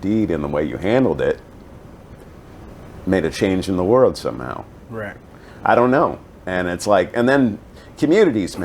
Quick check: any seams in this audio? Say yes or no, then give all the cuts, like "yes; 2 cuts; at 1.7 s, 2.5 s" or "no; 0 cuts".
no; 0 cuts